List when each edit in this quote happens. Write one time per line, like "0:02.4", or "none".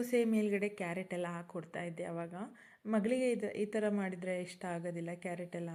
none